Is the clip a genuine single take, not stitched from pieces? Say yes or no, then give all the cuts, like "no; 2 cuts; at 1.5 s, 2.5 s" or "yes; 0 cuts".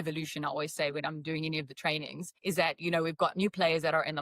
no; 1 cut; at 2.2 s